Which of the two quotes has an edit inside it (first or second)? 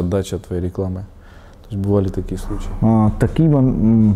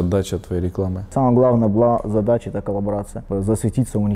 second